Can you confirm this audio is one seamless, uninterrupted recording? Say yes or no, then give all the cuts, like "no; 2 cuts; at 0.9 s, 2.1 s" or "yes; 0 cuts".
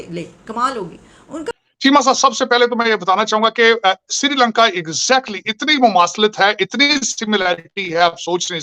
no; 1 cut; at 1.5 s